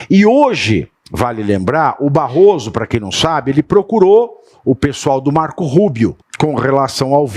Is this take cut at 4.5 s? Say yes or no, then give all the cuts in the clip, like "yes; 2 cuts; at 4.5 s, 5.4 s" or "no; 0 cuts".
no; 2 cuts; at 1.0 s, 6.2 s